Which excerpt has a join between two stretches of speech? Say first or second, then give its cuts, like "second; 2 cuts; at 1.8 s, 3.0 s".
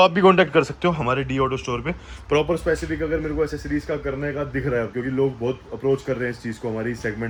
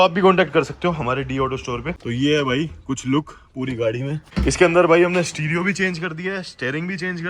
second; 2 cuts; at 2.0 s, 4.2 s